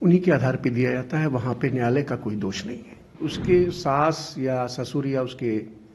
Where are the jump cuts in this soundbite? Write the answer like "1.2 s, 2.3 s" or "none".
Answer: 3.2 s